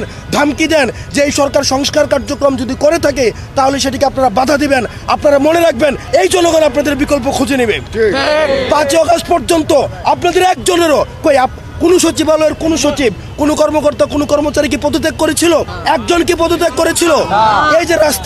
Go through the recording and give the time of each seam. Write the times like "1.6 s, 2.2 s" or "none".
none